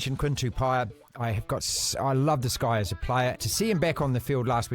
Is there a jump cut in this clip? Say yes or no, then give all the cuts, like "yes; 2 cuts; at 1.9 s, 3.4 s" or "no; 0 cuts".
yes; 1 cut; at 3.4 s